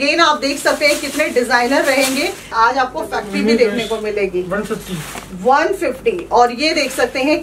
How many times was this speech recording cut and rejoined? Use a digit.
1